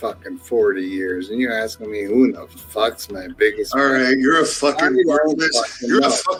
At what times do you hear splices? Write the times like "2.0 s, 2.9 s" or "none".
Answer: none